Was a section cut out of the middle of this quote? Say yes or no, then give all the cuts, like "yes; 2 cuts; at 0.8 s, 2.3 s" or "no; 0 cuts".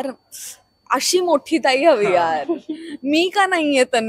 no; 0 cuts